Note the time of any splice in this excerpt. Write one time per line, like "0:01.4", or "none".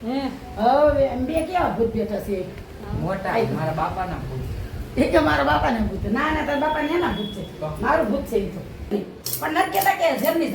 0:08.9